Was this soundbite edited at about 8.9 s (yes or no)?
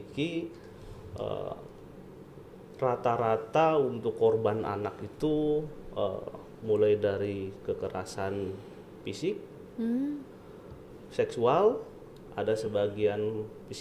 no